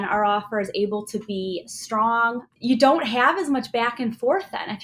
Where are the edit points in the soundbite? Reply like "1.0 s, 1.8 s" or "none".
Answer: 2.4 s